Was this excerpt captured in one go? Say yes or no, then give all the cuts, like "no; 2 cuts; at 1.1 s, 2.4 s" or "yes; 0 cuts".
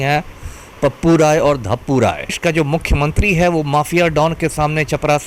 no; 1 cut; at 2.4 s